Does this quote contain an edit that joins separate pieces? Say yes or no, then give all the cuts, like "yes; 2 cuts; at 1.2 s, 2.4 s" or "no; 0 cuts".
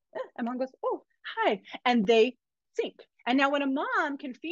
no; 0 cuts